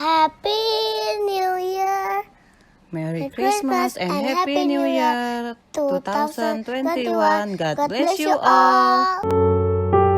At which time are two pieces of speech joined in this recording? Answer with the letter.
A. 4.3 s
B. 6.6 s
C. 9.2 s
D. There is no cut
C